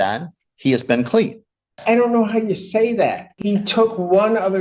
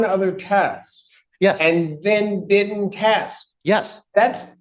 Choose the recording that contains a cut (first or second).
first